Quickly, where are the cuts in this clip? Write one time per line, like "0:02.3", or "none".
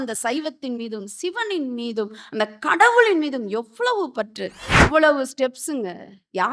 0:04.8